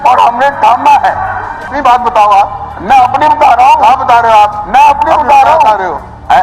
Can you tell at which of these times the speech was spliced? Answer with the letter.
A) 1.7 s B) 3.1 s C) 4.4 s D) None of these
A